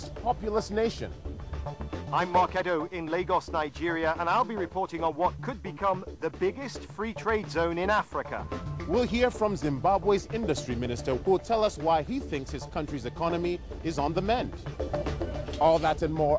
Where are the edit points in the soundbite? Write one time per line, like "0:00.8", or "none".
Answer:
0:14.6